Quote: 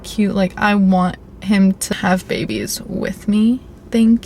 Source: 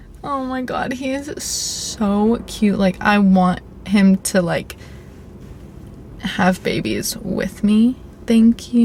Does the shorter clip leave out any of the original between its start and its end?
yes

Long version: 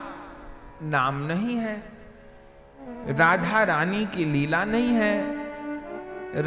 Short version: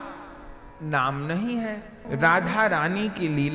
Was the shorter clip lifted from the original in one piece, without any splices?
no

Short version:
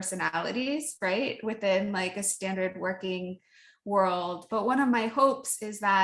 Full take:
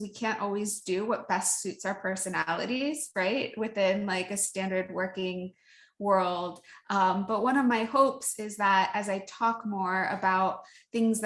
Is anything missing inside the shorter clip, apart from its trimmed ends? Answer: yes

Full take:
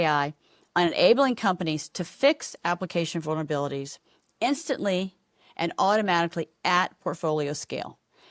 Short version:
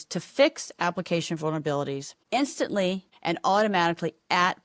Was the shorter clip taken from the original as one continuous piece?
no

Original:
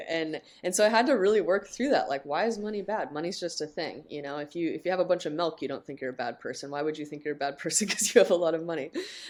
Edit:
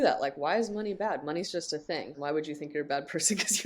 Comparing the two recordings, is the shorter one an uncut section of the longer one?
no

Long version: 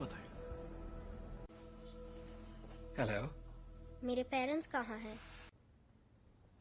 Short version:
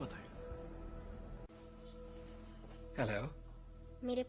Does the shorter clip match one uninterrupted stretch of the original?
yes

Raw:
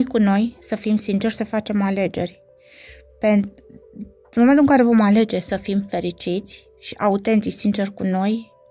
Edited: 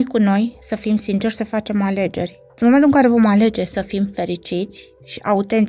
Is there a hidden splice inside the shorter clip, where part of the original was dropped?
yes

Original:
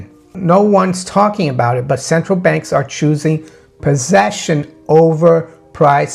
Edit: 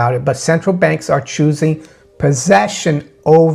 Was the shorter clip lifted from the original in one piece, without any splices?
yes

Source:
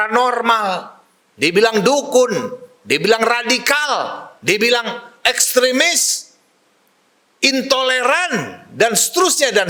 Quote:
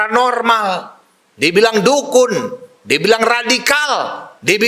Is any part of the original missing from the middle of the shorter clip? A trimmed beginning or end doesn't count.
no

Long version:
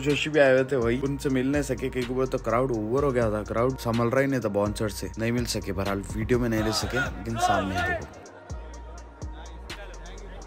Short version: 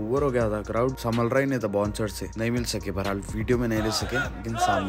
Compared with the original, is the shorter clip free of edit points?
yes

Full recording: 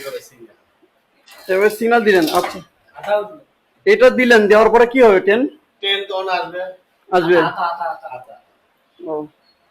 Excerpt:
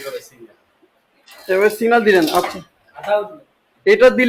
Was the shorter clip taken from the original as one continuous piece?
yes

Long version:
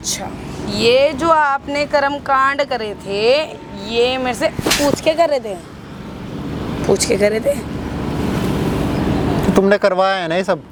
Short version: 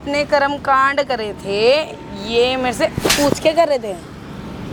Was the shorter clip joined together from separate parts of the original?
no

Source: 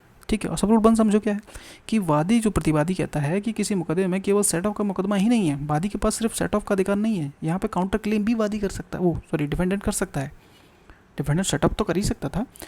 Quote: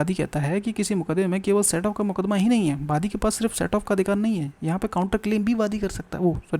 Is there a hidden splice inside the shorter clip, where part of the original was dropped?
no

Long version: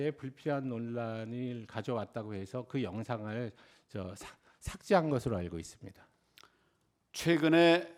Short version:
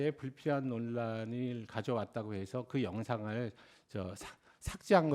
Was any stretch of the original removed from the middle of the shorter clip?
no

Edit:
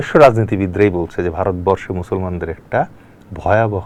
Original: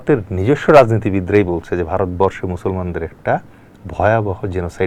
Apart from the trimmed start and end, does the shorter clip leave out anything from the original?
no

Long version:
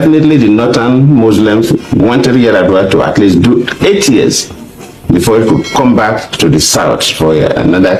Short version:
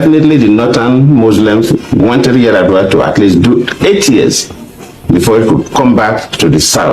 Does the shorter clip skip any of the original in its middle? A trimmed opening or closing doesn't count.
no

